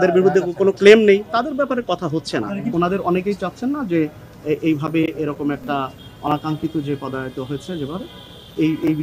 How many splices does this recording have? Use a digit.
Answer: 1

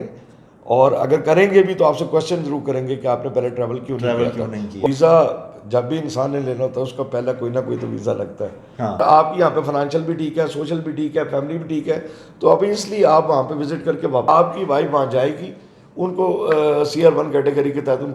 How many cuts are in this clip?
3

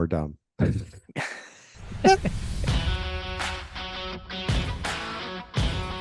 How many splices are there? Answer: 1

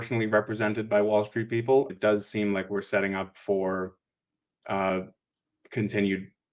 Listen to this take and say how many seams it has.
2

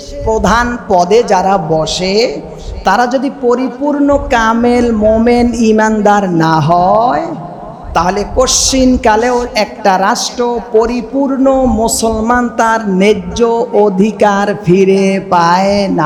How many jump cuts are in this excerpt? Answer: 0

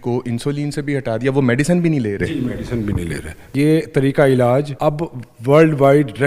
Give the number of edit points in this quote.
2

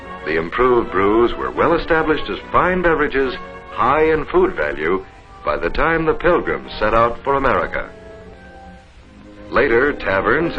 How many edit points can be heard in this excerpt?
0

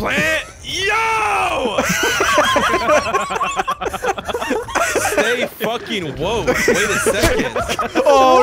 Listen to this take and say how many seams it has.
0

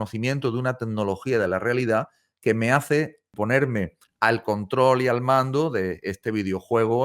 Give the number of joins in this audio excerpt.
2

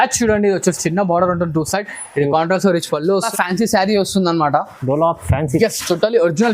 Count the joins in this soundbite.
1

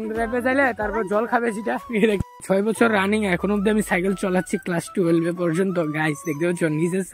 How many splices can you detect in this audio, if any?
1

